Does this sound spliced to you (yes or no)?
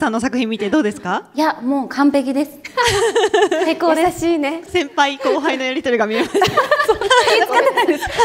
yes